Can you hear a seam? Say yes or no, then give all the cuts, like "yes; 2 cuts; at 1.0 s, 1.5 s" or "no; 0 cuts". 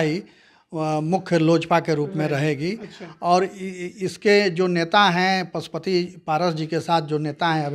no; 0 cuts